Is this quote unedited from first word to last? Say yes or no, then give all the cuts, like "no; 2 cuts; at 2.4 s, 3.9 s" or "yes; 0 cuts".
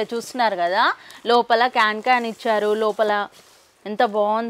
yes; 0 cuts